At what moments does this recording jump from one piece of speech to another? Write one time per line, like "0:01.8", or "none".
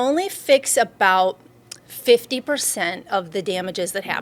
none